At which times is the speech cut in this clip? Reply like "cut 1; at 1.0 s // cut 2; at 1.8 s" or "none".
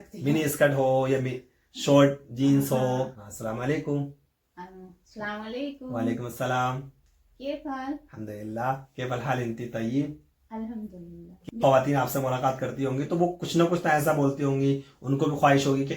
cut 1; at 3.3 s // cut 2; at 11.3 s